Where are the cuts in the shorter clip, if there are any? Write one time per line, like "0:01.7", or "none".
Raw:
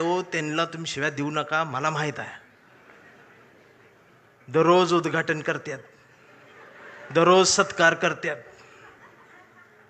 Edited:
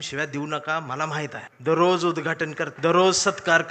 0:01.5
0:02.7